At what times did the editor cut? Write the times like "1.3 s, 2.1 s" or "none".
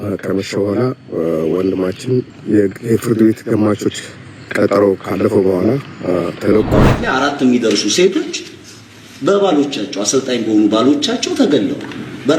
2.3 s, 7.0 s